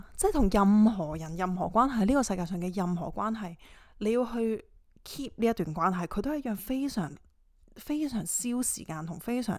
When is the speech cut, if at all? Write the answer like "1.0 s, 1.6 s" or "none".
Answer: none